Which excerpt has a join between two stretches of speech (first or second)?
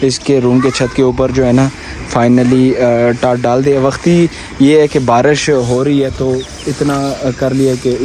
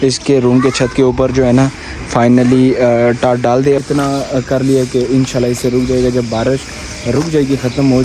second